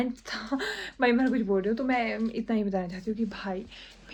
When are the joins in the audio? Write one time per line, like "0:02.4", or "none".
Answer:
none